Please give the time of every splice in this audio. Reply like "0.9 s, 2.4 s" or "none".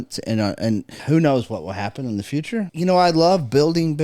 0.9 s, 2.7 s